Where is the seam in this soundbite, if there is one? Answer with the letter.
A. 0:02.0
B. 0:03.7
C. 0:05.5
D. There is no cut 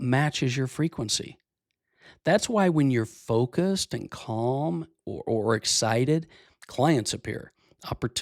D